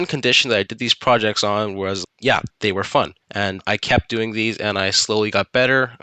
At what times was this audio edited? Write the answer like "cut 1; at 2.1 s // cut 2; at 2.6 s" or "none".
cut 1; at 2.1 s // cut 2; at 3.2 s